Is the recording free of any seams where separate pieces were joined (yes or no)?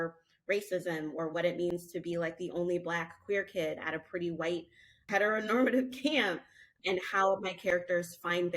no